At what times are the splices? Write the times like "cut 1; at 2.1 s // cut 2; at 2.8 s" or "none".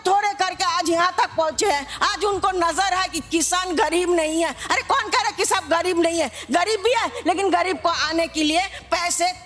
none